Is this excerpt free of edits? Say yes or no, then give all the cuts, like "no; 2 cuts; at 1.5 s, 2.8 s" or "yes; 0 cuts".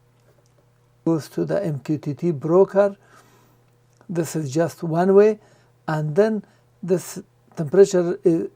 no; 1 cut; at 1.1 s